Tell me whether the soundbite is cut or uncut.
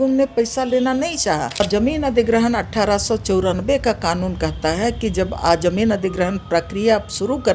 cut